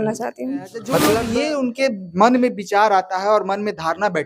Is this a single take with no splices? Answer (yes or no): no